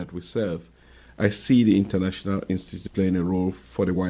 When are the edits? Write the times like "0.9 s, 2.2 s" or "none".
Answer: 2.8 s